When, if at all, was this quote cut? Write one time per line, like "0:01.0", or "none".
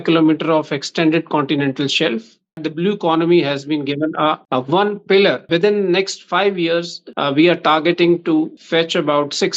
0:02.6
0:04.4
0:05.5
0:07.0
0:08.6